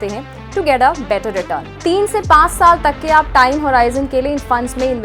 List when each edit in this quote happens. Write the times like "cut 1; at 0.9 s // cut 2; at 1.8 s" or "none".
cut 1; at 1.8 s